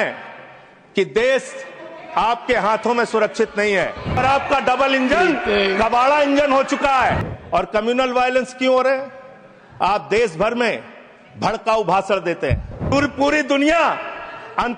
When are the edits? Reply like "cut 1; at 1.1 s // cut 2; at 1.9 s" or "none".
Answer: cut 1; at 4.2 s // cut 2; at 7.3 s // cut 3; at 12.9 s